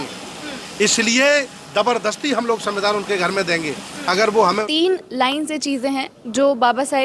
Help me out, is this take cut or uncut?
cut